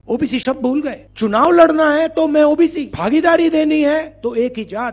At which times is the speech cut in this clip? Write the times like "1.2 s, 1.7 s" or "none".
1.0 s, 2.9 s, 4.1 s

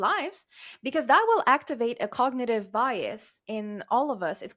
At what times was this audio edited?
none

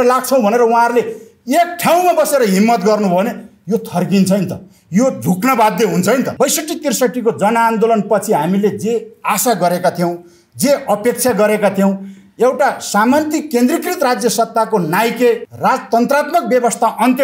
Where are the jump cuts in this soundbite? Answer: 6.3 s, 15.5 s

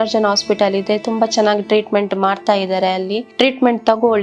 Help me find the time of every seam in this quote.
3.3 s

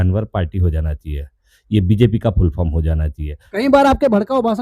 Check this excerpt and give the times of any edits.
3.4 s

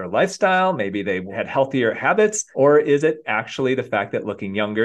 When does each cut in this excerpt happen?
1.3 s, 2.4 s

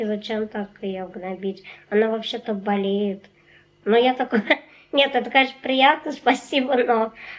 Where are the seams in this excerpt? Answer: none

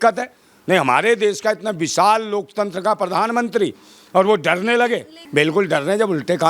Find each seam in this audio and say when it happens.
5.2 s

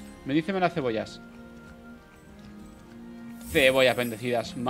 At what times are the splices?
none

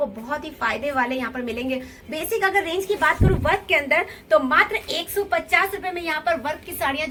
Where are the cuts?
none

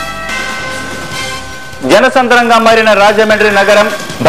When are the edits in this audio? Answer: 1.4 s

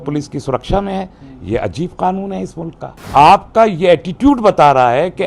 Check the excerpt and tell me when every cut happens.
3.1 s

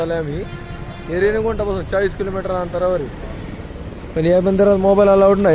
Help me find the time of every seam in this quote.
none

